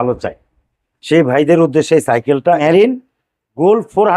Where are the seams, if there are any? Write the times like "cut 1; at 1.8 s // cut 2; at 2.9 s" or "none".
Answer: cut 1; at 2.6 s

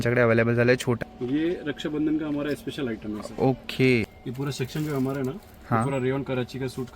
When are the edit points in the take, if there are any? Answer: cut 1; at 1.0 s // cut 2; at 4.1 s

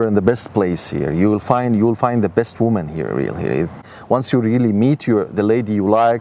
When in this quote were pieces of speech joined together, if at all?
cut 1; at 3.8 s

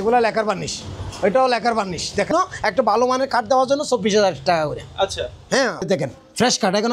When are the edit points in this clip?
cut 1; at 2.3 s // cut 2; at 5.8 s

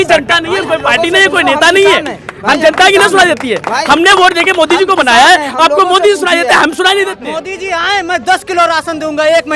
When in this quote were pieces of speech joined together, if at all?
cut 1; at 7.3 s

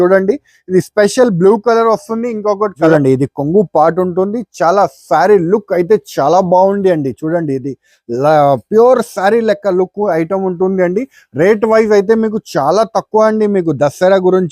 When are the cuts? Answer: cut 1; at 2.8 s

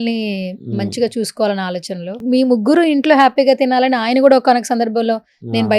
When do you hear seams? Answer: cut 1; at 2.2 s

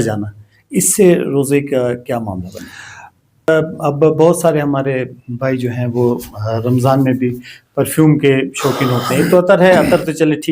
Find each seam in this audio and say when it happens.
cut 1; at 3.5 s

